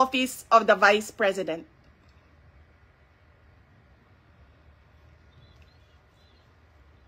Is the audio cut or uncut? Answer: uncut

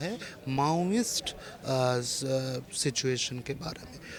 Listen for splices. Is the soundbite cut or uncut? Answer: uncut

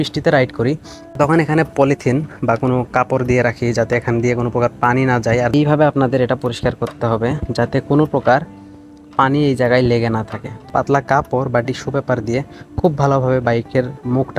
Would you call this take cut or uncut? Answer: cut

